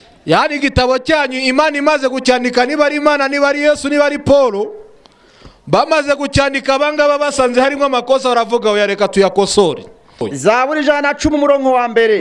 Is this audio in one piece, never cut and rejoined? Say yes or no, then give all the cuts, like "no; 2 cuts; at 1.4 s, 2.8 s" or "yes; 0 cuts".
no; 1 cut; at 10.3 s